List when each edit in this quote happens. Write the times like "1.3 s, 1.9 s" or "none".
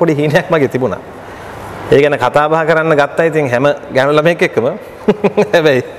none